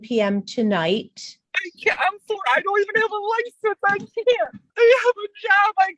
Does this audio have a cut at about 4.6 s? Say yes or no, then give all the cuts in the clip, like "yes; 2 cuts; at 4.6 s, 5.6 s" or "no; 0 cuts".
yes; 1 cut; at 4.6 s